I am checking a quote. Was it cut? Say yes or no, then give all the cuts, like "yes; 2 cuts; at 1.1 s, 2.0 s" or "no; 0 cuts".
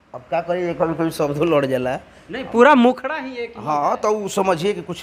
no; 0 cuts